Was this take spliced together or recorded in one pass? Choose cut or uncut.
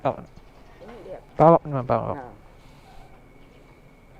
cut